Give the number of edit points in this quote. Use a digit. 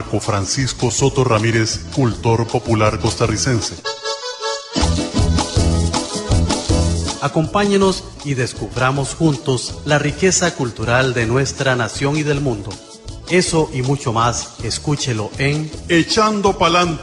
2